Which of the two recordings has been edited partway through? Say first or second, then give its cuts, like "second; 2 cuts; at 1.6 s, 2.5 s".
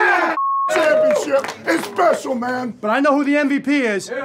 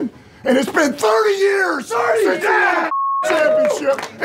first; 1 cut; at 2.7 s